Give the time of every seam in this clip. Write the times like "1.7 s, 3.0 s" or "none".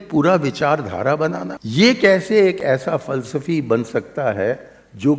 1.6 s